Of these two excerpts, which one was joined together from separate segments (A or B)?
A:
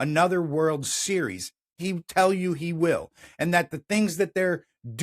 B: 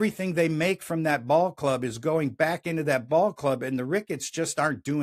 A